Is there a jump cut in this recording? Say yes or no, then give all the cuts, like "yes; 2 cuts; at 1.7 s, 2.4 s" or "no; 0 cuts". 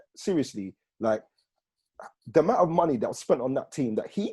no; 0 cuts